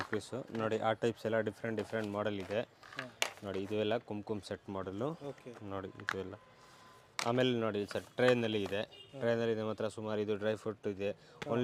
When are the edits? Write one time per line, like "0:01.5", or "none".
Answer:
none